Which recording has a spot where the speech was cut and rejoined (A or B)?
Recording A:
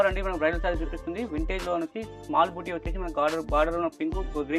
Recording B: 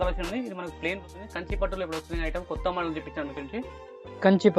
B